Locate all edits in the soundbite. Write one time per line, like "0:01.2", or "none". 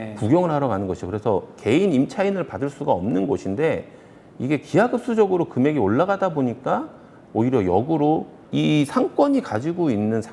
0:08.4